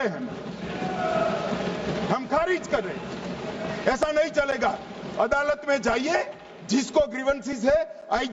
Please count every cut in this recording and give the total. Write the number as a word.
zero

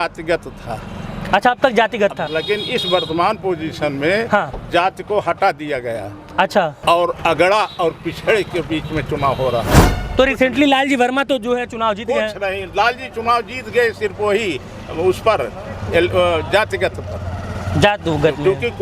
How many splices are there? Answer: three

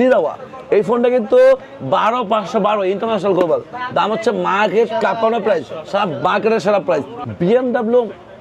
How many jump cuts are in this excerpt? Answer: one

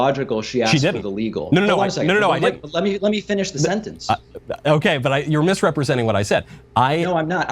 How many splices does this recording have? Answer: one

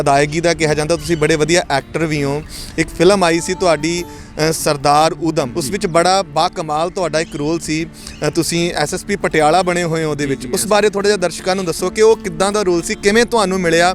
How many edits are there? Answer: one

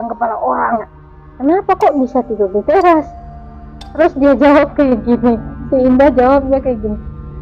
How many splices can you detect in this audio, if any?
one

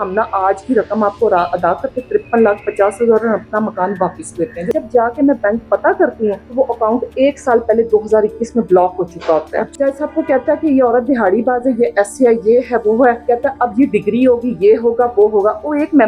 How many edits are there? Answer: four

